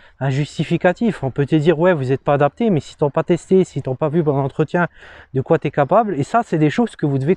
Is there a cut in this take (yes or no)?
no